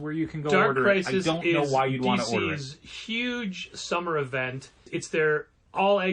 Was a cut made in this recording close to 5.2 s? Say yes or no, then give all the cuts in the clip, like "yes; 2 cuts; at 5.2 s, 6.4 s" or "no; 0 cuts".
yes; 1 cut; at 5.2 s